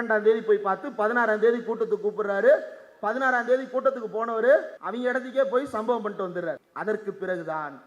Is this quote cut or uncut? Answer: cut